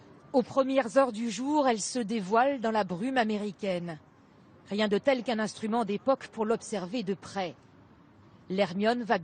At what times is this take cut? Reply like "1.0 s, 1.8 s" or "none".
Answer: 1.7 s